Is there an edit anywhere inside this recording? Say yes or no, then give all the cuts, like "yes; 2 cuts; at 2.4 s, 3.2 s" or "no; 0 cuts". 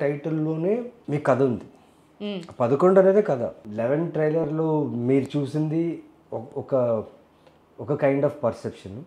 yes; 2 cuts; at 0.9 s, 3.6 s